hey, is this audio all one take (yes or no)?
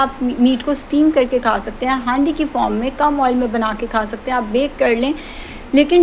yes